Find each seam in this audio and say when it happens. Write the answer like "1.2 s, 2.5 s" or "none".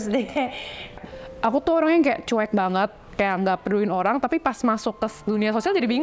1.0 s